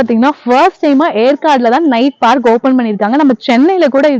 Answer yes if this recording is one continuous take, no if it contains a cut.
yes